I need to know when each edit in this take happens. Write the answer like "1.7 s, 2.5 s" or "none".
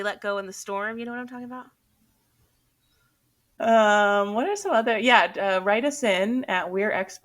3.6 s

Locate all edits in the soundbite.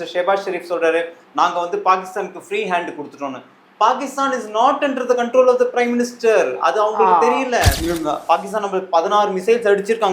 7.8 s

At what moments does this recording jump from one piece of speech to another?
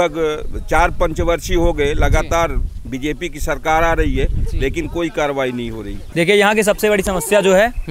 6.0 s

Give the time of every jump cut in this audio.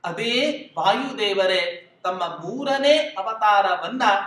none

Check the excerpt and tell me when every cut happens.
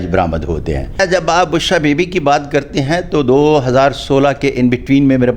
1.0 s

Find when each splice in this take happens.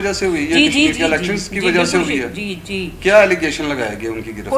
none

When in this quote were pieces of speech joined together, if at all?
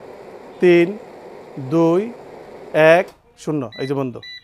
none

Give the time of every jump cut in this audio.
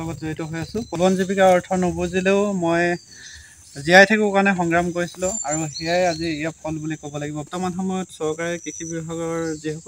1.0 s, 7.5 s

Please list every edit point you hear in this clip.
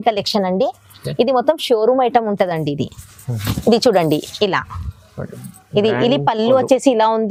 none

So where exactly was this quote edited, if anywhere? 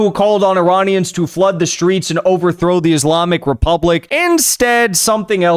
4.1 s

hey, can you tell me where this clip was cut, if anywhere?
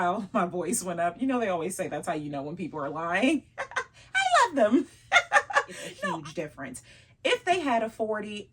5.8 s

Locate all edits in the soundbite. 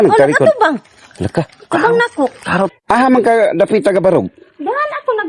2.7 s

